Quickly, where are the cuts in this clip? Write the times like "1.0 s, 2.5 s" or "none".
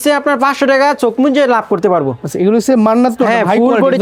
none